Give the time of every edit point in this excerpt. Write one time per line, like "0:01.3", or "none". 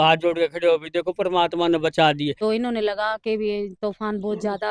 0:02.4